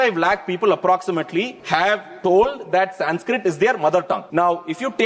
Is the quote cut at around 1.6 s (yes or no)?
yes